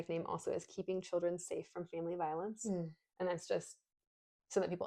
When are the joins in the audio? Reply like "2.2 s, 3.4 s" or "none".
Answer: none